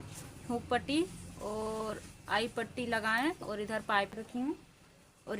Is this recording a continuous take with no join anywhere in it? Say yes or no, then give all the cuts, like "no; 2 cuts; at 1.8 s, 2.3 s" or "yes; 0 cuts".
no; 1 cut; at 4.2 s